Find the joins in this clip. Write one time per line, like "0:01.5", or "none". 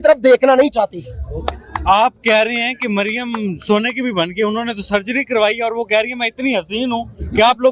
none

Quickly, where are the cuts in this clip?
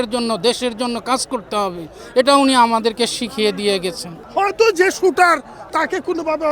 0:04.1

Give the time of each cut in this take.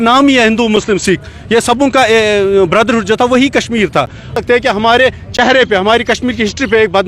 0:04.4

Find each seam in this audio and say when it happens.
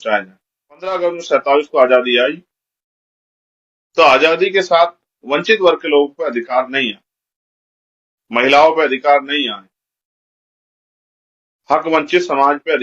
0:00.9

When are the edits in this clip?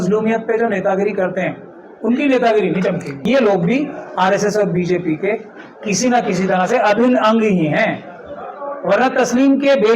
0:03.1

